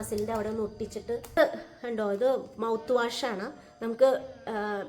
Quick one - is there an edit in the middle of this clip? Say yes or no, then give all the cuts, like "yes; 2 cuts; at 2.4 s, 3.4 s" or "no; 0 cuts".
yes; 1 cut; at 1.4 s